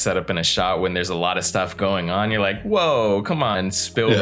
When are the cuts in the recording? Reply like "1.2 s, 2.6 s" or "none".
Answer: none